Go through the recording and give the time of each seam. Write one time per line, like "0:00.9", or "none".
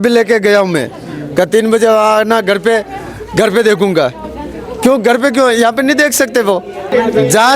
none